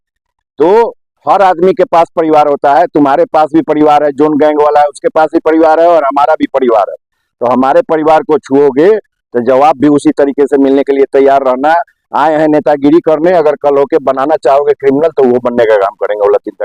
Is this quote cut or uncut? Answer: uncut